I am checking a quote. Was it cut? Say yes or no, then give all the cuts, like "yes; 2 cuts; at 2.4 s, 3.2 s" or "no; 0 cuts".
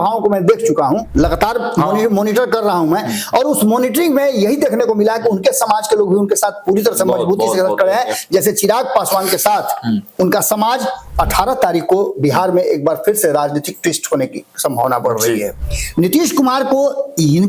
yes; 3 cuts; at 1.1 s, 11.1 s, 15.5 s